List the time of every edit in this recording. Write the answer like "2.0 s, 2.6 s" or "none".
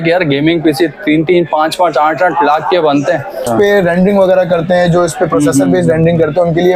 3.5 s